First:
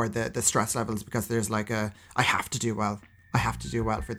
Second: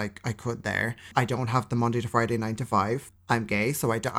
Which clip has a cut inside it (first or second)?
second